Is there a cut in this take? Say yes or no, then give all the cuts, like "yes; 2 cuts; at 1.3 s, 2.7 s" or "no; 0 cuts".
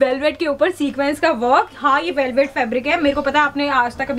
no; 0 cuts